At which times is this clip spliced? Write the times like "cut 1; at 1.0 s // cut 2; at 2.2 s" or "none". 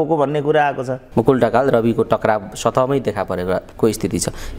cut 1; at 1.0 s // cut 2; at 3.7 s